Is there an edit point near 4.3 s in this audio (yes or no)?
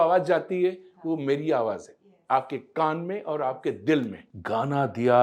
yes